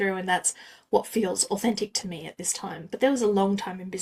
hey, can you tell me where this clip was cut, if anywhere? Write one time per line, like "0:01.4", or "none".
none